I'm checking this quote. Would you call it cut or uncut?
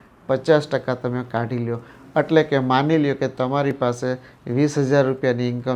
uncut